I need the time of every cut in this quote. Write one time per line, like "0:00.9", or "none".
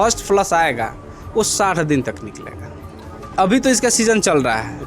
0:03.2